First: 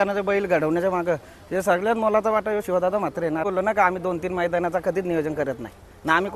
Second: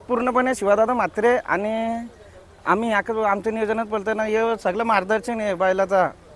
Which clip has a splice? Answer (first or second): first